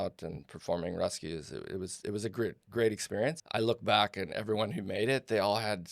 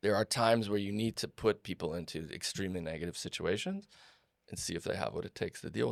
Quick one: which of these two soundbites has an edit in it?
first; 1 cut; at 3.4 s

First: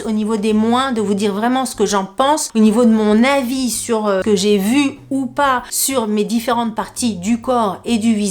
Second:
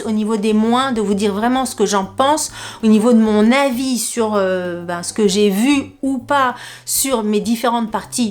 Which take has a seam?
first; 3 cuts; at 2.5 s, 4.2 s, 5.7 s

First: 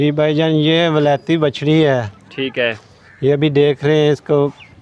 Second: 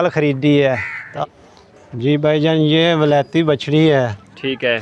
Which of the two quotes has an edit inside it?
second; 1 cut; at 1.0 s

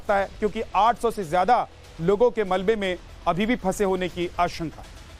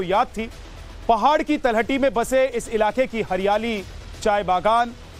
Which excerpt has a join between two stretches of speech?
first; 1 cut; at 4.1 s

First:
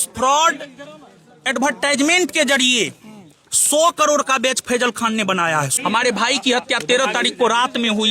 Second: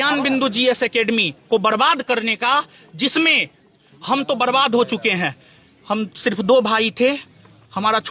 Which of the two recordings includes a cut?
first; 1 cut; at 5.7 s

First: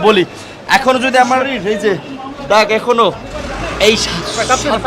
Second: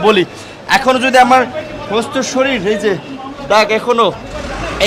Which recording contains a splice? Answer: first; 1 cut; at 1.5 s

